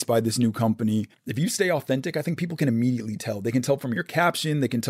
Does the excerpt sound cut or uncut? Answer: cut